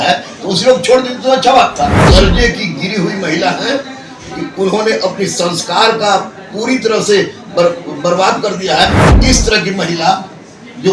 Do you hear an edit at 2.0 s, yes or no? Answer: yes